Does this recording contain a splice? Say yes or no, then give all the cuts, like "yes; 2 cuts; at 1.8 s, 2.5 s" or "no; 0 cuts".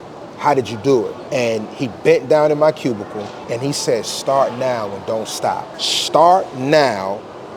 yes; 3 cuts; at 1.2 s, 3.3 s, 5.8 s